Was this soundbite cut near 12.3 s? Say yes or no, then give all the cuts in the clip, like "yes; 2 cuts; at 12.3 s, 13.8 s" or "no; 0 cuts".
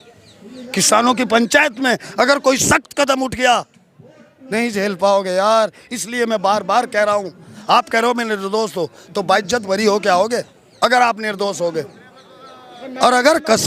no; 1 cut; at 7.5 s